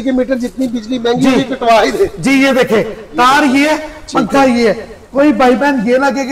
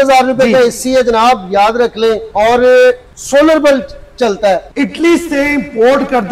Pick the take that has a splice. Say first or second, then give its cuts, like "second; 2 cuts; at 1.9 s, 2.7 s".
second; 3 cuts; at 2.3 s, 3.1 s, 4.7 s